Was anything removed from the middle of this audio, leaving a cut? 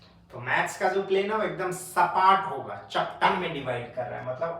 yes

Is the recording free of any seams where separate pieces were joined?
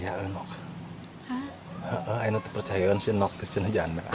yes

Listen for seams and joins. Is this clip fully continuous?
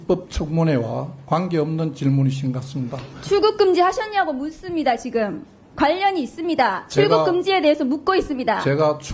yes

